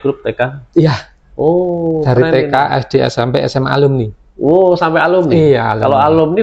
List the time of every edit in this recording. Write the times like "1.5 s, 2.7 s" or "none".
none